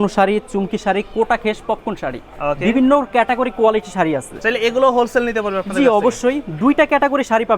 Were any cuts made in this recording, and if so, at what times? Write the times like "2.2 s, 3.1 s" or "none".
none